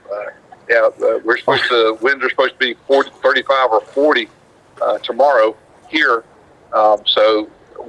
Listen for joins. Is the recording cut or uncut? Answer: uncut